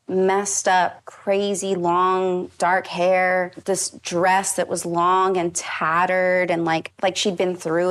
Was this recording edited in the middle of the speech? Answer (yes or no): yes